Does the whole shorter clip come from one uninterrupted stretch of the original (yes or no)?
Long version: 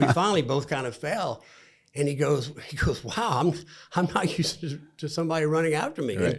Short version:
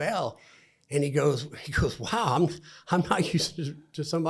yes